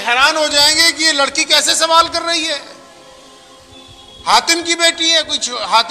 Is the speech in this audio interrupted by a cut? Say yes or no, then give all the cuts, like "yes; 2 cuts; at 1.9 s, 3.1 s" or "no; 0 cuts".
no; 0 cuts